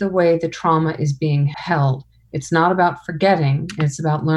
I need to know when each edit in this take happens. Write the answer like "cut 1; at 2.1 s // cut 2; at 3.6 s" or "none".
cut 1; at 1.5 s